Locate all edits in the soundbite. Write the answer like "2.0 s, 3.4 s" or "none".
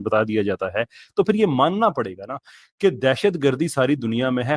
none